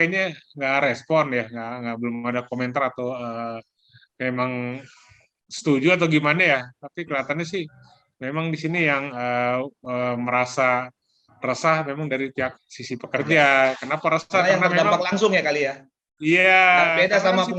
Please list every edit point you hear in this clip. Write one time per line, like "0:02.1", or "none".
none